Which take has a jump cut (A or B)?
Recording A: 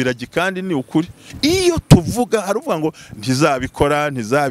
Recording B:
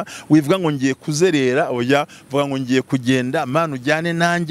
A